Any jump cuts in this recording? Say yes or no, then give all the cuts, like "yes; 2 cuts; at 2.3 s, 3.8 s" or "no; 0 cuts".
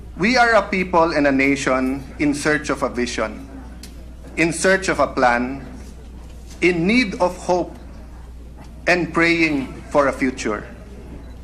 no; 0 cuts